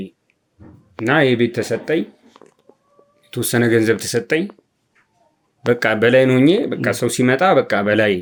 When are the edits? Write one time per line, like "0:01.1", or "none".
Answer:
none